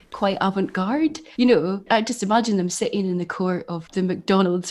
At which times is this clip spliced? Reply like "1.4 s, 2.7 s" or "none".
1.2 s, 1.9 s, 3.8 s